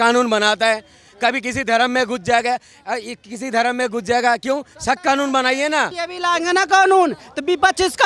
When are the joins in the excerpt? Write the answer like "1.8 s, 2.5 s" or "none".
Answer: 6.0 s

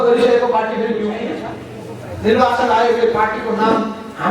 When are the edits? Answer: 1.3 s

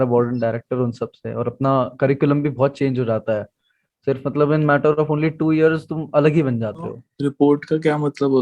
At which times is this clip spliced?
7.1 s

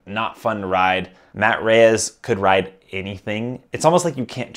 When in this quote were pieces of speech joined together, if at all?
1.2 s, 3.6 s

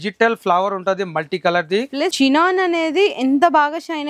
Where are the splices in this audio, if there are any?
2.1 s

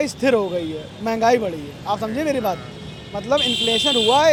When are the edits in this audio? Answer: none

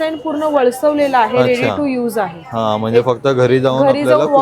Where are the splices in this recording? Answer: none

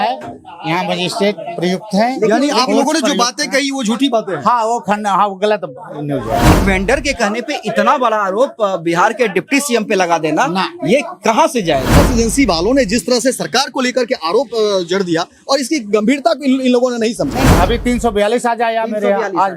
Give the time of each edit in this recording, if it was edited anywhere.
6.5 s, 11.9 s, 17.5 s

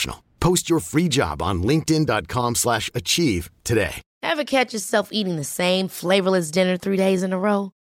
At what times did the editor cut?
none

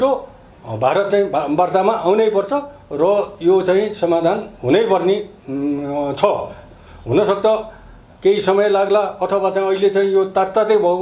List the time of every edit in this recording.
none

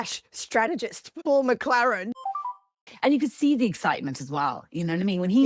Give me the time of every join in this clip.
1.1 s, 2.7 s

